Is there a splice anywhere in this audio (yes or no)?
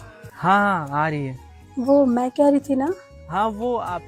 no